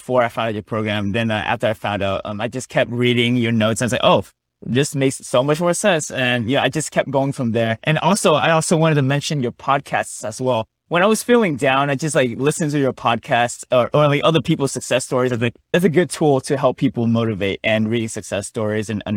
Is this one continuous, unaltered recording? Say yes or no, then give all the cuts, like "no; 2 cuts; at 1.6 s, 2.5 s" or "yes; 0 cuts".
no; 1 cut; at 15.7 s